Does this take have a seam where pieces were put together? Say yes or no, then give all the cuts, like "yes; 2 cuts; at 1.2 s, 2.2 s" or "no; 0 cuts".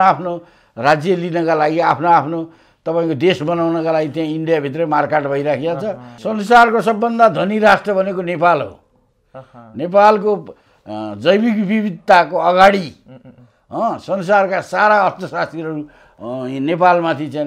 yes; 1 cut; at 6.1 s